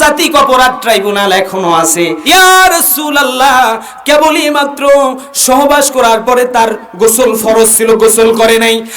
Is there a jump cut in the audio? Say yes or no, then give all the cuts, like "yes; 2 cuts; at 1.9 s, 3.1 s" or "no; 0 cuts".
yes; 1 cut; at 2.2 s